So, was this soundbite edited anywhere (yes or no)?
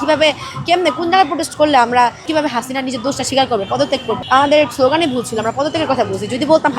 yes